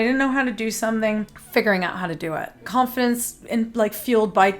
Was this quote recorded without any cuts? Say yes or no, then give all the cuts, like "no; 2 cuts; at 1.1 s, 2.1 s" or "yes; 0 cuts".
no; 2 cuts; at 1.4 s, 2.6 s